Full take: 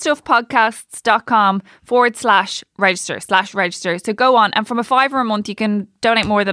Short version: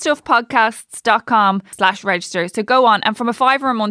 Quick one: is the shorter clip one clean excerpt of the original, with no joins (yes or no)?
no